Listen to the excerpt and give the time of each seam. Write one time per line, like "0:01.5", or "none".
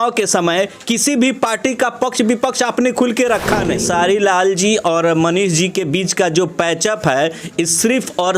0:03.8